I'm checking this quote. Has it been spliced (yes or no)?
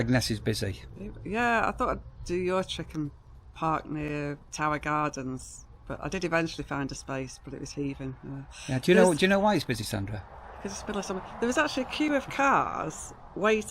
no